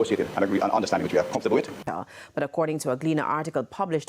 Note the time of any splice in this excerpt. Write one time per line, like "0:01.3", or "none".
0:01.9